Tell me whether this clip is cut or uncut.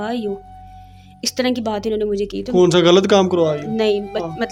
uncut